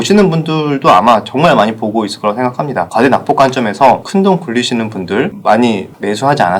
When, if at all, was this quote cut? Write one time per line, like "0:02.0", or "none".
0:02.9
0:04.0
0:05.4